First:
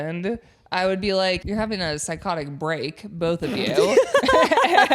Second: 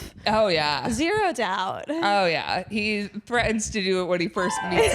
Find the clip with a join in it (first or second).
first